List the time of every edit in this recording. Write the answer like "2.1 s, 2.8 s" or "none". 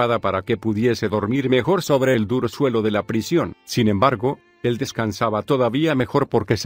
5.6 s